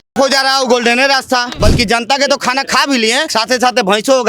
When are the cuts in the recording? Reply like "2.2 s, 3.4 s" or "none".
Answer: 1.5 s, 3.3 s